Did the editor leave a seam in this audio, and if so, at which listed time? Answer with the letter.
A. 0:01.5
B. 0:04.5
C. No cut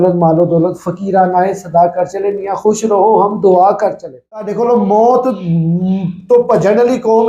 B